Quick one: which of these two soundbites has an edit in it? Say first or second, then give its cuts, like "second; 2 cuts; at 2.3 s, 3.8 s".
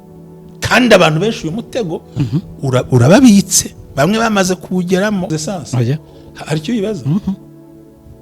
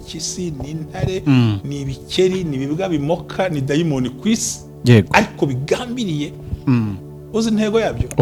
first; 1 cut; at 5.3 s